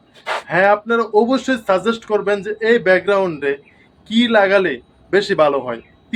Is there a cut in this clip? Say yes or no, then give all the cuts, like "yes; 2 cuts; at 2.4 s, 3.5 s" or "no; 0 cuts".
no; 0 cuts